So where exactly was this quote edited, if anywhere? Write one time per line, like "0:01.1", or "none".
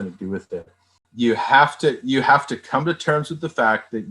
0:01.1